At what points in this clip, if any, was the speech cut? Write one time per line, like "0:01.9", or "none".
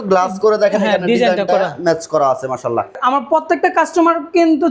0:03.0